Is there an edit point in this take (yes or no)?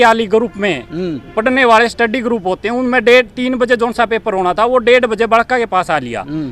no